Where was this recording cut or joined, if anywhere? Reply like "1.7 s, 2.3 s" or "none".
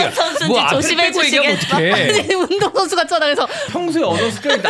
3.7 s